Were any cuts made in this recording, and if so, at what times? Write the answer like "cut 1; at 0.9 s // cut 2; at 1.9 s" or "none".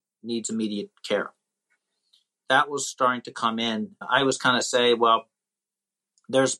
cut 1; at 2.3 s // cut 2; at 4.0 s